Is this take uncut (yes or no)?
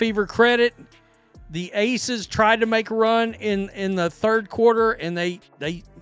yes